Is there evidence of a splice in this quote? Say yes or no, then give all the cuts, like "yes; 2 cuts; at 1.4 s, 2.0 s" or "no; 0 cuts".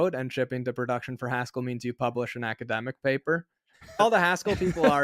yes; 1 cut; at 4.0 s